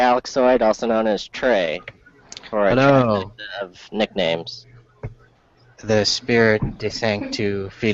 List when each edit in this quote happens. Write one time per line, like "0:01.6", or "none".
none